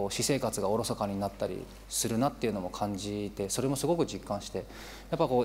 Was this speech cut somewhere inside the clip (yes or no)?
no